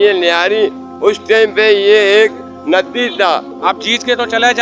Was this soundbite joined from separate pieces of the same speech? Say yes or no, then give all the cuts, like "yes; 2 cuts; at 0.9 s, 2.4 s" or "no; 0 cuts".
yes; 1 cut; at 3.5 s